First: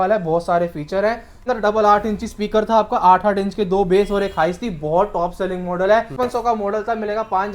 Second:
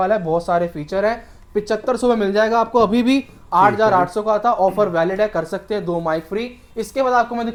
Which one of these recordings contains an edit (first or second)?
first